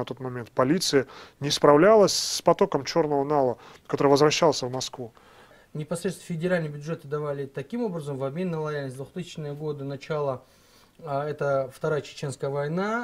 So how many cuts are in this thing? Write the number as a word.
zero